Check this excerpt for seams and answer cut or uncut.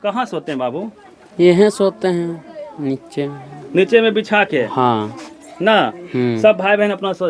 uncut